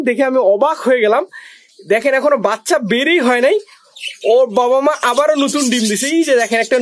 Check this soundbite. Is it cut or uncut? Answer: uncut